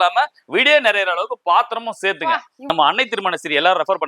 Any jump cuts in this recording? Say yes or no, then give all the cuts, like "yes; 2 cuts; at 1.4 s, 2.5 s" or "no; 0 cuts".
yes; 1 cut; at 2.6 s